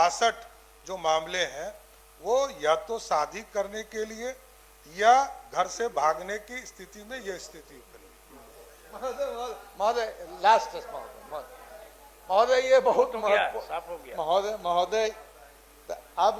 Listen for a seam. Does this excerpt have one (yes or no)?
no